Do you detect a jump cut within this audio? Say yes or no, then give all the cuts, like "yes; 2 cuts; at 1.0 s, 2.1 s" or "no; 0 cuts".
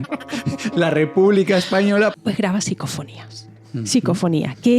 yes; 1 cut; at 2.1 s